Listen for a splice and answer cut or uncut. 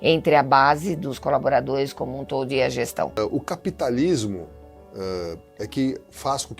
cut